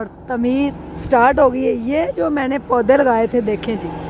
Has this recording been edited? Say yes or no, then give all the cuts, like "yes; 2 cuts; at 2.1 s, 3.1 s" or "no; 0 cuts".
no; 0 cuts